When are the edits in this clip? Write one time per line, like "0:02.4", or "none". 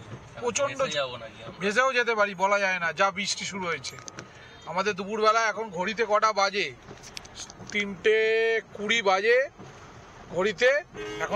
none